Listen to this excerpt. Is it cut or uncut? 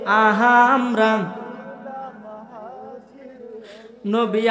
uncut